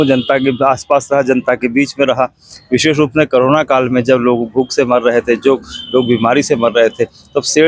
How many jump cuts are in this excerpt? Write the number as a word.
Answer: zero